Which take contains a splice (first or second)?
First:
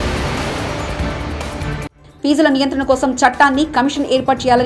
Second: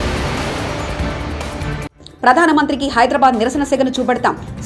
first